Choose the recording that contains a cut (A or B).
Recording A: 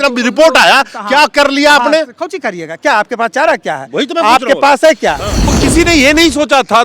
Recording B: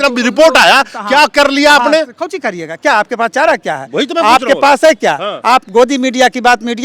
A